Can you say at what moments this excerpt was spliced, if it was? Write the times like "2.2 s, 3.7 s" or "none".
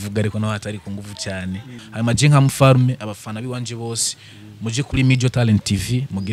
1.7 s